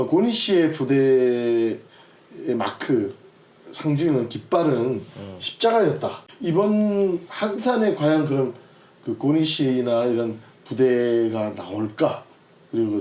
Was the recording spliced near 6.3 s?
yes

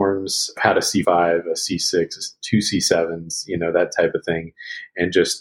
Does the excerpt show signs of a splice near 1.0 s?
yes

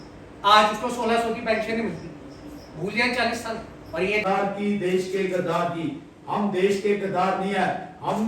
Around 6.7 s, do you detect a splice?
no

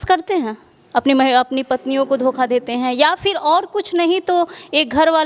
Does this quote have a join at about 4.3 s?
no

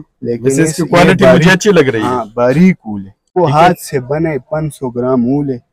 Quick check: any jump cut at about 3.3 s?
yes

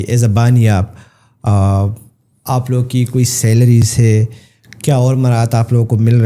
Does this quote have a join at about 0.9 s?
no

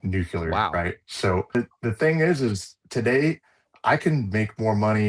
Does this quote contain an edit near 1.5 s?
yes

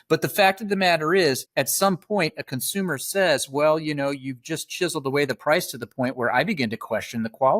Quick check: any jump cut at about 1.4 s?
yes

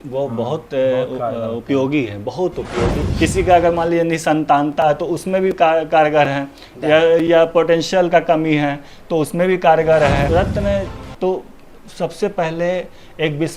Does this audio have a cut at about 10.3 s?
yes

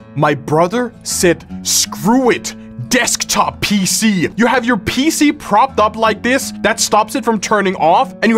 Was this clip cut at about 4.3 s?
yes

